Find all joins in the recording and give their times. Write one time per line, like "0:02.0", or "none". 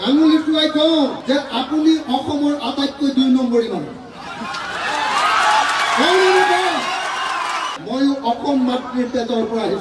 none